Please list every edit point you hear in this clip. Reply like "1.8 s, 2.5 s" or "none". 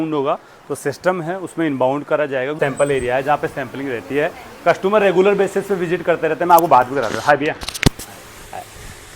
2.6 s